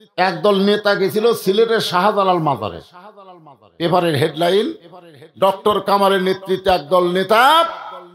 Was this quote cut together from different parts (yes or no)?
no